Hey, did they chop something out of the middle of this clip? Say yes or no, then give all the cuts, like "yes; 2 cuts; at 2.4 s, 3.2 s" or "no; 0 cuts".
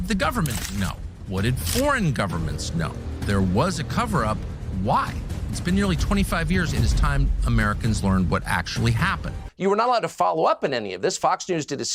yes; 1 cut; at 9.5 s